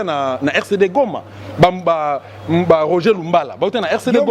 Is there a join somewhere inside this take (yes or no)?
no